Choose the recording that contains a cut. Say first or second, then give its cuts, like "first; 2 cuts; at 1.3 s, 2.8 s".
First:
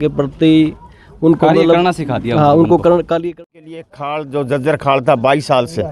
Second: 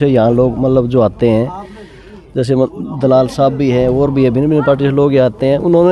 first; 1 cut; at 3.3 s